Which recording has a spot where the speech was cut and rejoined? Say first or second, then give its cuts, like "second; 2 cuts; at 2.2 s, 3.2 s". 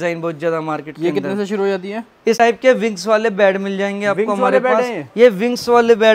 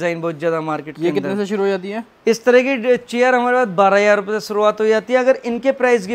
first; 1 cut; at 2.4 s